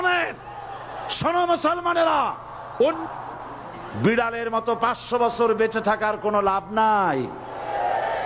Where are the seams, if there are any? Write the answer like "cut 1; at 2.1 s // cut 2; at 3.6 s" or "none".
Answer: cut 1; at 3.0 s